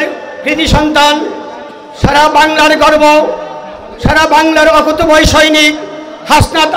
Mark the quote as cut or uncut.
uncut